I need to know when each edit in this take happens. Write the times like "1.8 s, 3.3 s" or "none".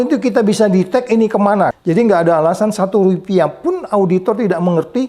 1.7 s